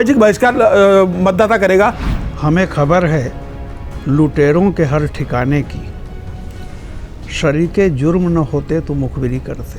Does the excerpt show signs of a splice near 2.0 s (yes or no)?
yes